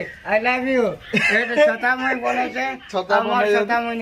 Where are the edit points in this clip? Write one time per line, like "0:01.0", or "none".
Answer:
0:01.5

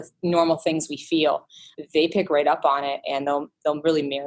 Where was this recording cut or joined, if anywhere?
none

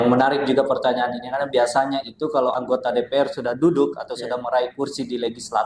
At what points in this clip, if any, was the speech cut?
0:02.5

